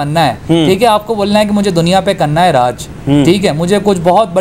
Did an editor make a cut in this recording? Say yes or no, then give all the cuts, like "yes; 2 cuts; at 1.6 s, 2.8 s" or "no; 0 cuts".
no; 0 cuts